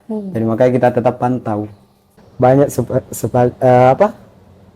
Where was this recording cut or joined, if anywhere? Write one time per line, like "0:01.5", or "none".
0:02.1